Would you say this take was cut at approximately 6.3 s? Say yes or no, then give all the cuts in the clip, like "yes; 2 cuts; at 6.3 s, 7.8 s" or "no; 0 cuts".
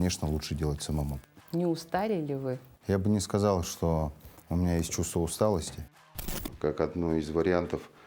yes; 3 cuts; at 1.1 s, 2.7 s, 6.3 s